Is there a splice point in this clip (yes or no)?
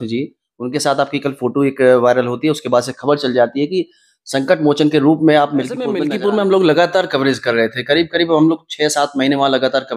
yes